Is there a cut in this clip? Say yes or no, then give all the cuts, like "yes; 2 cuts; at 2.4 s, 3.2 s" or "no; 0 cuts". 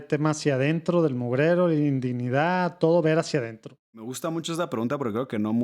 yes; 1 cut; at 4.0 s